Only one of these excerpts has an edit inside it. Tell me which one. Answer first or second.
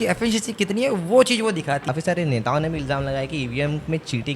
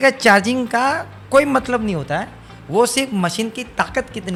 first